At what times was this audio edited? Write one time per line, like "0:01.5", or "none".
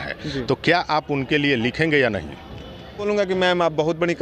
0:03.0